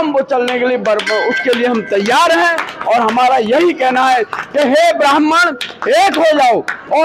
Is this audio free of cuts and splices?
yes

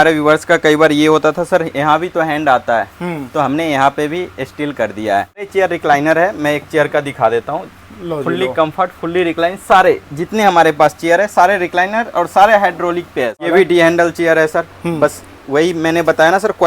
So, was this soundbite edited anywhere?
yes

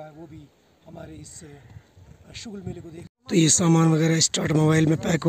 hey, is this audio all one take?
no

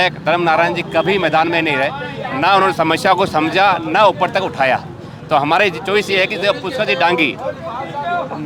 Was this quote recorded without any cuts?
yes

